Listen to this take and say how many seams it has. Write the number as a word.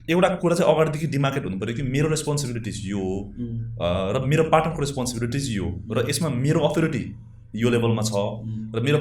zero